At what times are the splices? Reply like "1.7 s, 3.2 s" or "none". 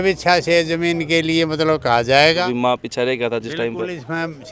2.4 s

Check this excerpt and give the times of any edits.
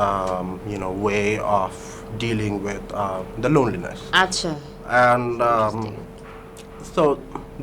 none

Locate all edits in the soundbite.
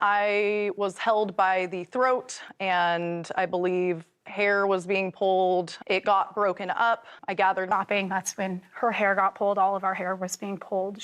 7.7 s

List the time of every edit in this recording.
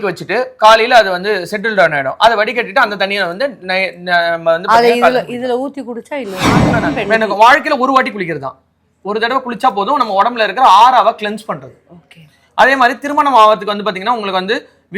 6.8 s

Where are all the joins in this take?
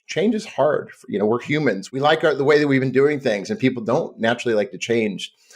1.8 s

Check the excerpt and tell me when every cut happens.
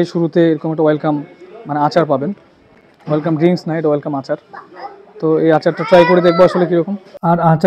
none

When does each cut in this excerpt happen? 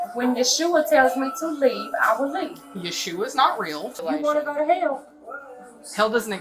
4.0 s

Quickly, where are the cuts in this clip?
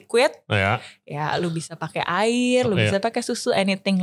none

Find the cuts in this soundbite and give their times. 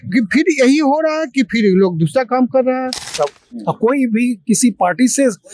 3.1 s

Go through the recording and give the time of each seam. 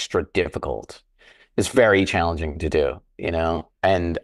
none

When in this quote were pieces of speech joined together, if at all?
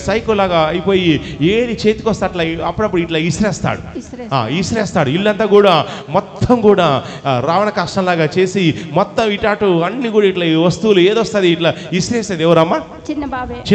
none

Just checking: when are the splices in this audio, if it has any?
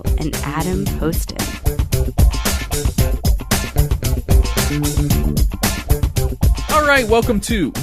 none

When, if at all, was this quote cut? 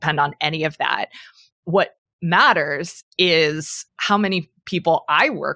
none

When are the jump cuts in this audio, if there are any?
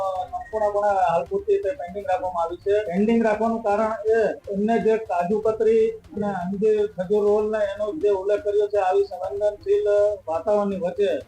2.9 s, 4.4 s

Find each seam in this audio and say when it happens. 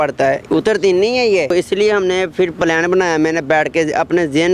1.5 s

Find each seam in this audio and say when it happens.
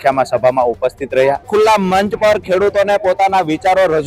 1.5 s

